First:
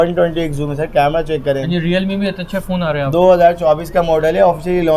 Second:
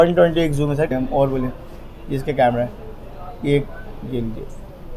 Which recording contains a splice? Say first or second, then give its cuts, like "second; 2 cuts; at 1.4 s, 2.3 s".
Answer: second; 1 cut; at 0.9 s